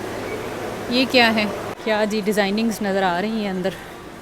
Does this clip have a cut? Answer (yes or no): yes